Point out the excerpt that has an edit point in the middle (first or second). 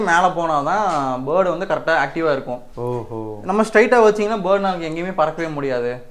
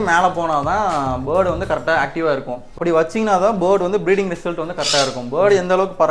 second